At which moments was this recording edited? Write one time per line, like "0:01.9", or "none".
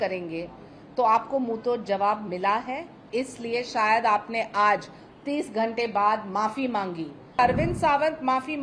0:07.4